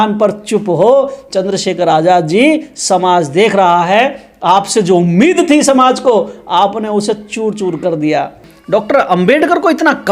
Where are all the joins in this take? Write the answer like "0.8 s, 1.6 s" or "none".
8.5 s